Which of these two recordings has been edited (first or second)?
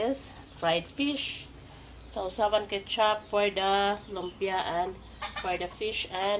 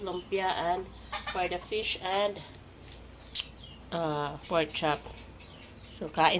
second